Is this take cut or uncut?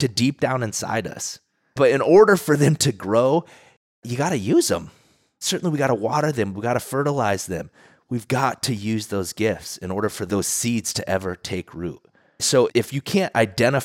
uncut